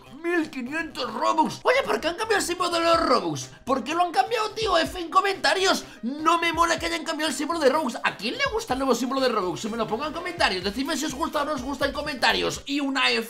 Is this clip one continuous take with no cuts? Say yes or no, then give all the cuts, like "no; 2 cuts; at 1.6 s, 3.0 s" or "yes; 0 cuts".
yes; 0 cuts